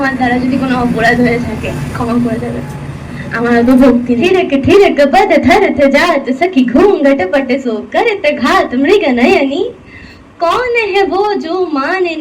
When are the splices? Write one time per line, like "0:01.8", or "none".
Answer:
0:04.2

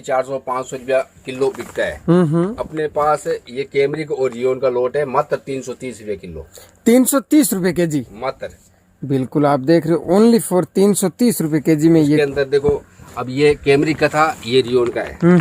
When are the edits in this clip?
none

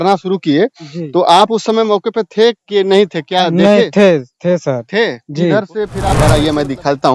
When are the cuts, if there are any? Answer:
0:06.0

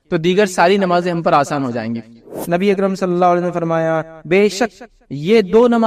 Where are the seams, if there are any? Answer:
0:02.3

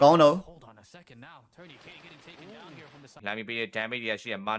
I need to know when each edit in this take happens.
0:03.2

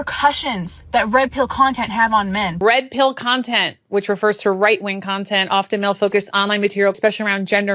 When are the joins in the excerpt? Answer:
0:02.6
0:07.0

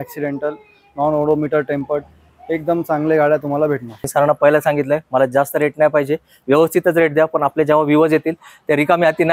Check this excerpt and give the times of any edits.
0:04.0

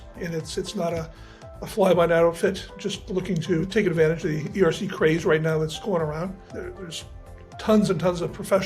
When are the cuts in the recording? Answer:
0:03.6
0:06.4

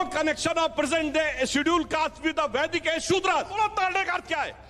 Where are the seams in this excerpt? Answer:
0:03.5

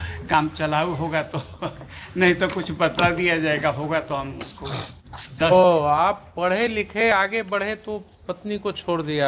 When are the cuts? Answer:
0:05.3

